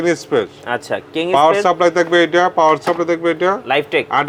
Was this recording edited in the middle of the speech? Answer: no; 0 cuts

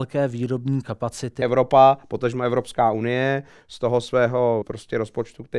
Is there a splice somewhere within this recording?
yes; 2 cuts; at 1.3 s, 4.6 s

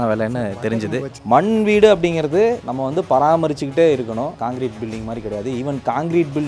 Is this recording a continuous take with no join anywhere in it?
no; 1 cut; at 1.2 s

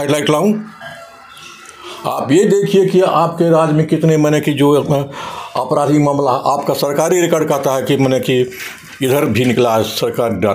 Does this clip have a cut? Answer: no; 0 cuts

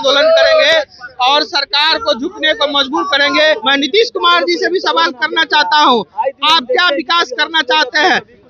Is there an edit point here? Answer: yes; 1 cut; at 3.4 s

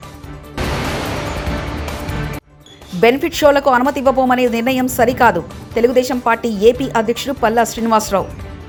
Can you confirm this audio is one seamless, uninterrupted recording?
yes; 0 cuts

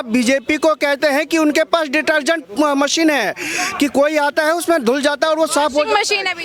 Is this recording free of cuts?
yes; 0 cuts

